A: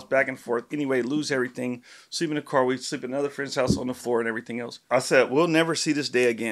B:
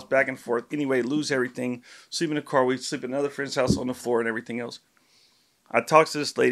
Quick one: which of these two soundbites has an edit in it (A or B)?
A